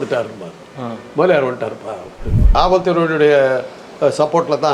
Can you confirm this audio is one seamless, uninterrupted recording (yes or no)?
no